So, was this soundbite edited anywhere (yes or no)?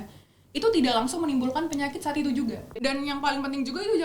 yes